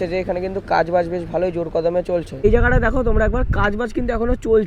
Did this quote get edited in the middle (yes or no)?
yes